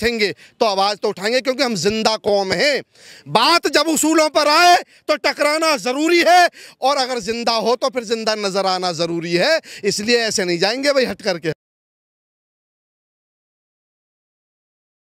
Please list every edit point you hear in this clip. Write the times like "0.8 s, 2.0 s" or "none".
none